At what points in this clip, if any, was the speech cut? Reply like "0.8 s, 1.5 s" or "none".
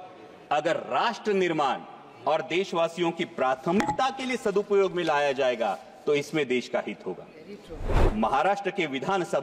8.0 s